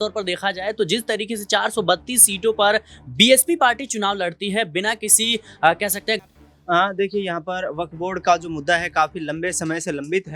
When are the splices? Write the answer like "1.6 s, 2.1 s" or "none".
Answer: 6.2 s